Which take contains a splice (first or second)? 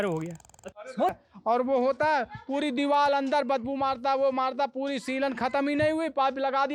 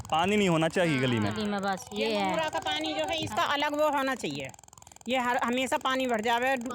first